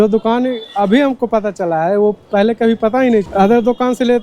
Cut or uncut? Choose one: cut